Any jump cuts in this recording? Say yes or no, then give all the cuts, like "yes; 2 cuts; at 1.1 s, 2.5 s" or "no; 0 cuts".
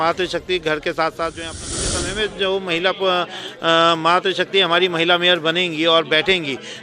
yes; 1 cut; at 1.8 s